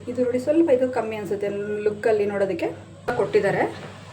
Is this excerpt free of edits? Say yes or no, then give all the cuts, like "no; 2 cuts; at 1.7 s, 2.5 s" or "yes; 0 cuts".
no; 1 cut; at 3.1 s